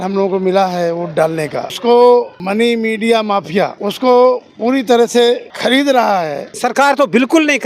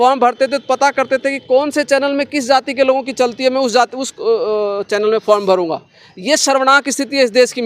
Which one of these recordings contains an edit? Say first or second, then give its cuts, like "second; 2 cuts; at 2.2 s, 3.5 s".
first; 5 cuts; at 1.7 s, 2.4 s, 3.8 s, 5.5 s, 6.5 s